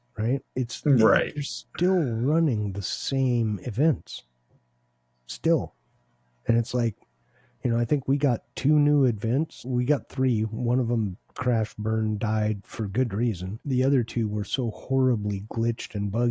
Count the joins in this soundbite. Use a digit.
2